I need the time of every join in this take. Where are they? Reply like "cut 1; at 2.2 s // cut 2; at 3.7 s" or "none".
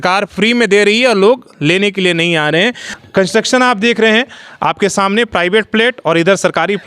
cut 1; at 2.9 s